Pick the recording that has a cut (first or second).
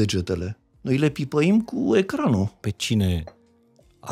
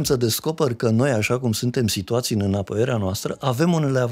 first